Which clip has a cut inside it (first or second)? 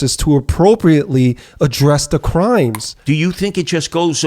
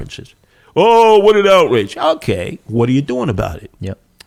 first